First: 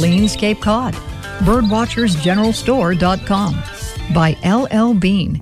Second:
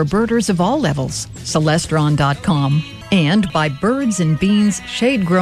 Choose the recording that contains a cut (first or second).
second